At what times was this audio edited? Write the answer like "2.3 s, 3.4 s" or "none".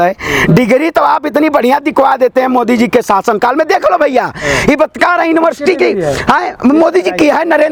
none